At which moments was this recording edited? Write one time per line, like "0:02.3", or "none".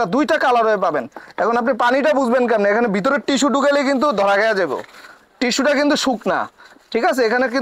none